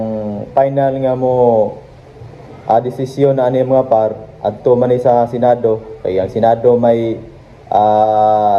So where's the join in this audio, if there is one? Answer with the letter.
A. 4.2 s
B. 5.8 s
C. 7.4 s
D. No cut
D